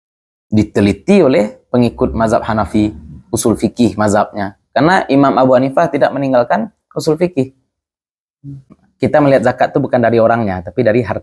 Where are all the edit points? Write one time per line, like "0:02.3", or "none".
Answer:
0:08.7